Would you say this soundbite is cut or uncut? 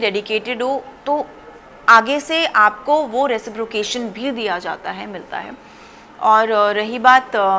uncut